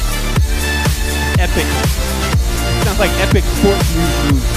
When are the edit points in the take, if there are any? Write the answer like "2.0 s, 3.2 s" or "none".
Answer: 2.6 s